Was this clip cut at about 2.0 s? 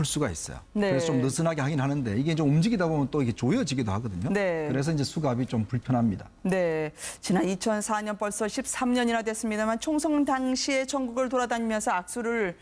yes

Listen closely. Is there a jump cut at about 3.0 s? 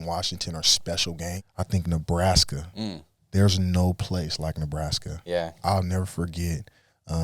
no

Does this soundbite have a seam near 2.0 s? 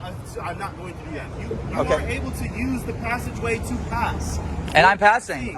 yes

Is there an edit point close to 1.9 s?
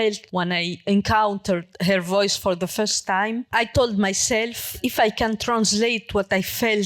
no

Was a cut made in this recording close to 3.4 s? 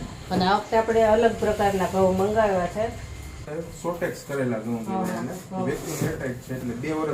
yes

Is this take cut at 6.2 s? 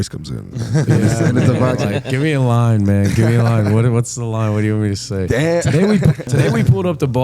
yes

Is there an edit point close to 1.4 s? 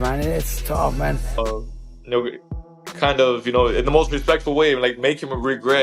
yes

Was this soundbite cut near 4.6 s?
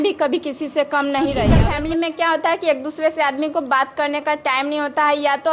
no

